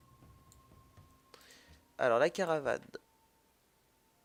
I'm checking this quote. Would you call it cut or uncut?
uncut